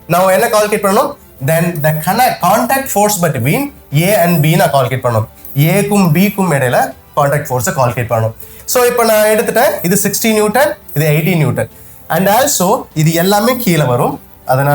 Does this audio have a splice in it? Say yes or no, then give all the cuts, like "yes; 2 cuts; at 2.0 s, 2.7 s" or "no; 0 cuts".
yes; 1 cut; at 8.5 s